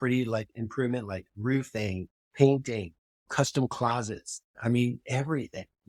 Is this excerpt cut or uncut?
uncut